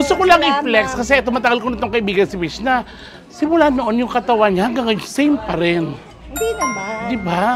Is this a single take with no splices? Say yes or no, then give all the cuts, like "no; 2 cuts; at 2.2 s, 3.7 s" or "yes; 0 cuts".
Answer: yes; 0 cuts